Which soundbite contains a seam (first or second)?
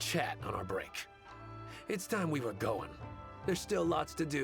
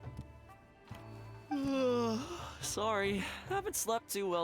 second